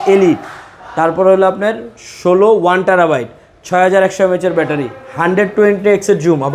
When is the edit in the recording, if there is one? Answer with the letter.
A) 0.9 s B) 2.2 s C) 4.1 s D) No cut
D